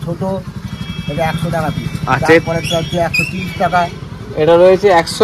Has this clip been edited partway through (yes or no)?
no